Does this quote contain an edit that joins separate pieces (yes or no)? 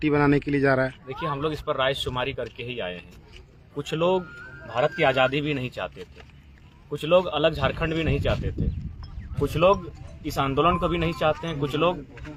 no